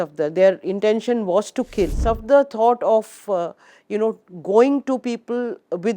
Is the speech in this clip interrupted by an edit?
yes; 1 cut; at 2.0 s

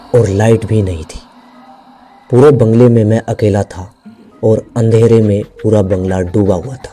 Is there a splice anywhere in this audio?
no; 0 cuts

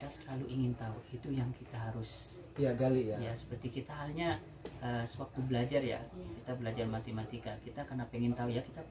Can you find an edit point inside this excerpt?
no; 0 cuts

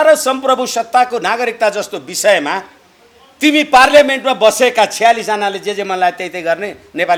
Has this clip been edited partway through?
no; 0 cuts

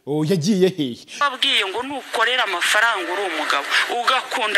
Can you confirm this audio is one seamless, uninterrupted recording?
no; 1 cut; at 1.2 s

